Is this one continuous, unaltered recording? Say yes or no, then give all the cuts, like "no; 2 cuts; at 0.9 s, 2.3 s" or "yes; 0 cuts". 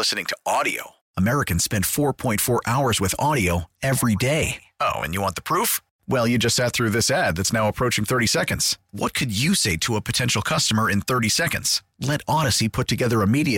yes; 0 cuts